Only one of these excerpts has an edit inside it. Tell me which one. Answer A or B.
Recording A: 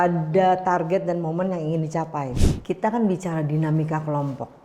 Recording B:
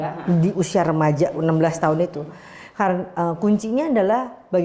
A